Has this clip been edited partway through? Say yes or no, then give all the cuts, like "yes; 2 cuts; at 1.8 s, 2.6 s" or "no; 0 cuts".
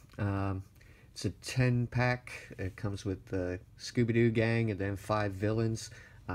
yes; 1 cut; at 3.4 s